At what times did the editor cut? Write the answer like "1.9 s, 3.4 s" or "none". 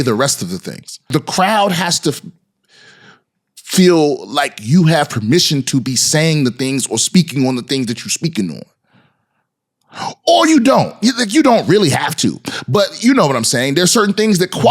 1.0 s